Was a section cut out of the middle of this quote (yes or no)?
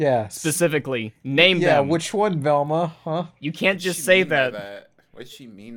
no